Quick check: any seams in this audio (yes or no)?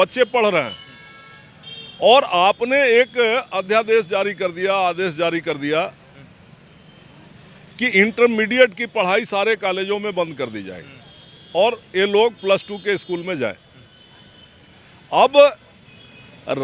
no